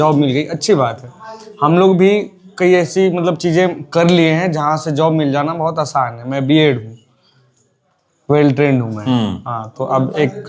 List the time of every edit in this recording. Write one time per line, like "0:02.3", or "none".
none